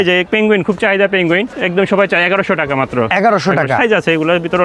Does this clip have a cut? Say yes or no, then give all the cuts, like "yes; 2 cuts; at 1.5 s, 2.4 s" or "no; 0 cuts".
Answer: yes; 1 cut; at 1.5 s